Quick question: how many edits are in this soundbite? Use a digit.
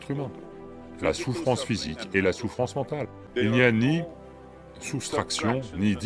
1